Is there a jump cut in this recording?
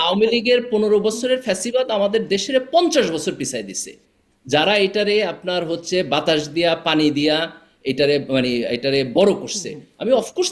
no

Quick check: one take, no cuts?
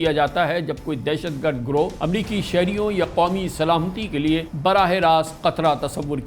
no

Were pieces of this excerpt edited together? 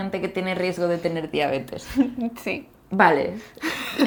no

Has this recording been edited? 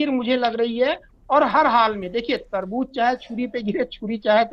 no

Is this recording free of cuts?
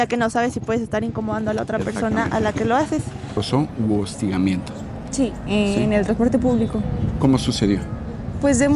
no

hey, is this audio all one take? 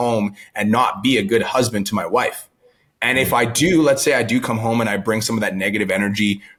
yes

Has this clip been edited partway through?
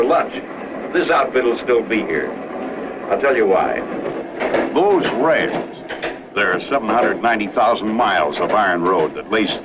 no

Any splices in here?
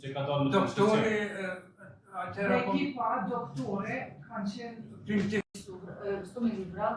yes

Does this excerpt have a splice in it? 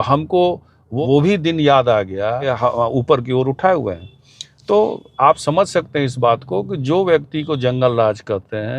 yes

